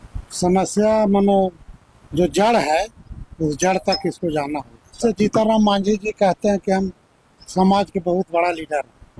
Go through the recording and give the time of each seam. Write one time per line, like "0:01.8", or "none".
0:05.0